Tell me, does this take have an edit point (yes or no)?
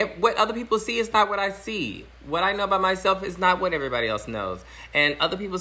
no